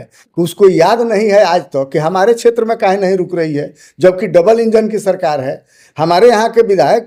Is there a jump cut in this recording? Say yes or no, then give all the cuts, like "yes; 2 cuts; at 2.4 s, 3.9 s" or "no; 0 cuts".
no; 0 cuts